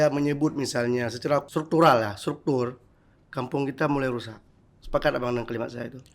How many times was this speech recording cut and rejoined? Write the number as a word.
one